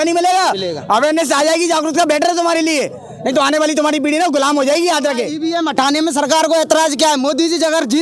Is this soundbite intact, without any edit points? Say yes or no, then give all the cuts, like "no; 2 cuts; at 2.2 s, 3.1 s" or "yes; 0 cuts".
no; 1 cut; at 5.3 s